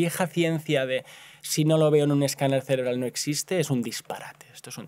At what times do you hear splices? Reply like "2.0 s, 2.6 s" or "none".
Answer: none